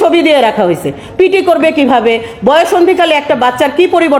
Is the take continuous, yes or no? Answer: yes